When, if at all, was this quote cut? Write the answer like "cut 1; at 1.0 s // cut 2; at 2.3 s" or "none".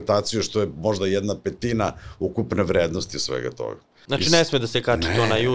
cut 1; at 3.9 s